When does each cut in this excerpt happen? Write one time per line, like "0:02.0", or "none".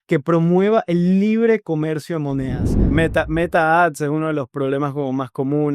0:02.9

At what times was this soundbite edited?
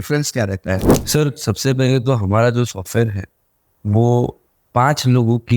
0:00.9

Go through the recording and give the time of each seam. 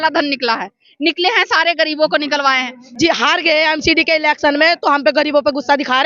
0:02.9

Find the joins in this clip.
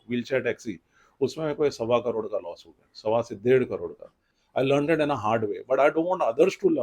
0:04.3

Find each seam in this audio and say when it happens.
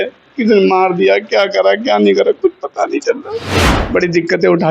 0:03.5

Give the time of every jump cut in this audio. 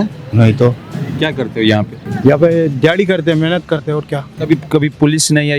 0:01.0
0:02.0
0:04.3

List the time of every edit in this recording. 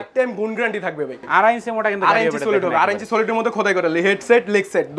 0:01.2

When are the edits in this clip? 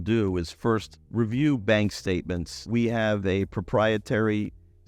0:01.0
0:02.6

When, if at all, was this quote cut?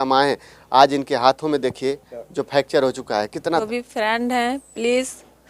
0:03.6

